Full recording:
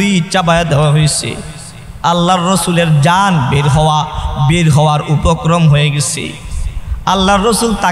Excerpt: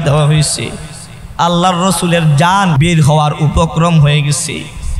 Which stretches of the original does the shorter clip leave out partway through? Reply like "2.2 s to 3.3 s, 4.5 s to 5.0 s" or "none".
3.4 s to 4.4 s